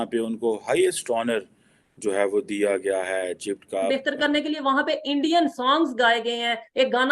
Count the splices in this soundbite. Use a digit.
1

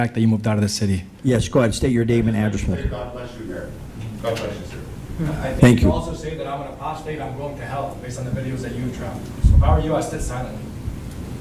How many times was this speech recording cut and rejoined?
1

